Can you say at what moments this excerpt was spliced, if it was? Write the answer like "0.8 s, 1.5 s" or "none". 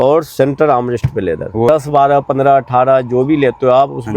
1.7 s

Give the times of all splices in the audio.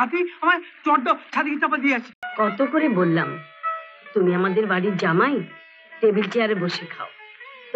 2.2 s

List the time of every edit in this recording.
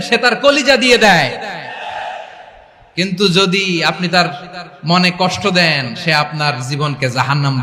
none

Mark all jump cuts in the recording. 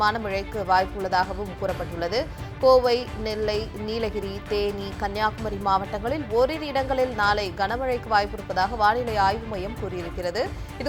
none

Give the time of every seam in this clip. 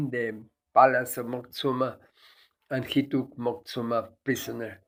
none

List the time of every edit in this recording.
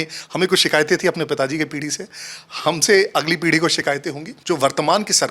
4.3 s

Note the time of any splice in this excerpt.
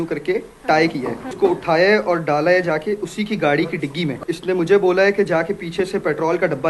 1.3 s, 4.2 s

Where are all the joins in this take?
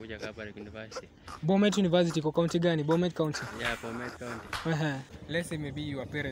5.2 s

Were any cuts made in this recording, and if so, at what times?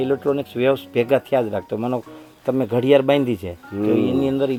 none

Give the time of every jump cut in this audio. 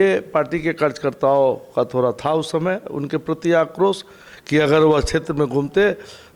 none

